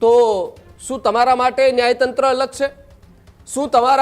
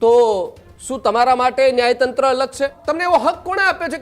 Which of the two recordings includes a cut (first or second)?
second